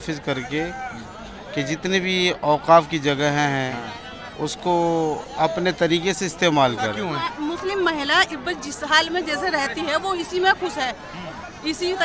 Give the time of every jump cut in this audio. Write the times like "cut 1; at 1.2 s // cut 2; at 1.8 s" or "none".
cut 1; at 7.2 s